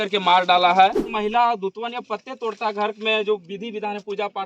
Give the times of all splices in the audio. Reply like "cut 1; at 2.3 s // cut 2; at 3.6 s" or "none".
cut 1; at 1.1 s